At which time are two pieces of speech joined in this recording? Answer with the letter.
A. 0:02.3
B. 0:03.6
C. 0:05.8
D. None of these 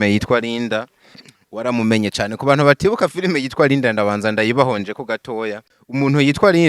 C